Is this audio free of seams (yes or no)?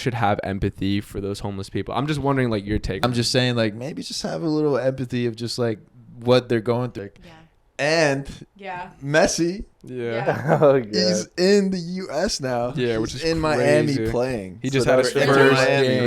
no